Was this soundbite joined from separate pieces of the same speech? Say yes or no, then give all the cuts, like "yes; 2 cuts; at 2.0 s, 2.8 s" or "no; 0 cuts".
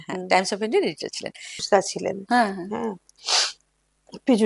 yes; 1 cut; at 1.6 s